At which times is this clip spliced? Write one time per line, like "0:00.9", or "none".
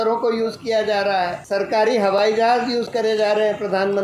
0:01.4

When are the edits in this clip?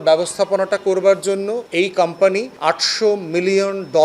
0:01.6
0:02.5

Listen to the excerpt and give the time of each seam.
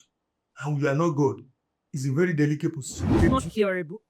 0:03.1

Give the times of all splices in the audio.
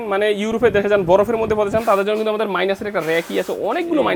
none

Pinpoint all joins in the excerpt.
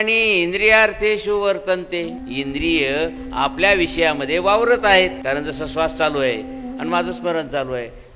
0:02.2
0:05.2

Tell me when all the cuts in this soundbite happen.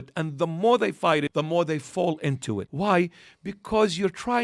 0:01.3
0:02.7

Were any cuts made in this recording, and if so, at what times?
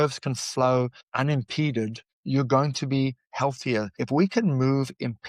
0:01.0
0:02.1
0:04.0

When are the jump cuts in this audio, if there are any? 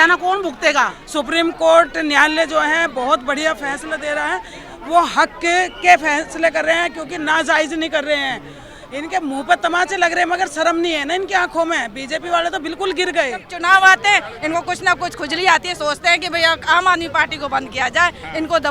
0:01.0
0:13.5

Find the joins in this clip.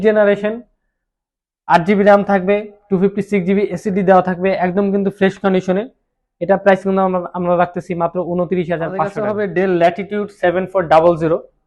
0:09.2

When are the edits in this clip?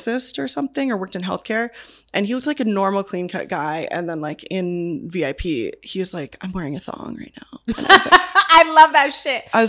none

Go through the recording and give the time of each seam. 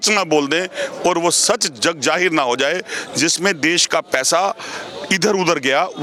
none

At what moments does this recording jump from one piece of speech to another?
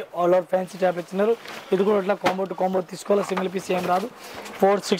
none

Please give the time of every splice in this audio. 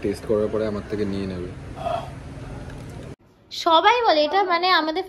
0:03.3

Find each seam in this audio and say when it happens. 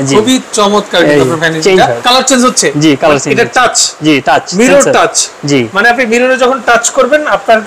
0:02.0

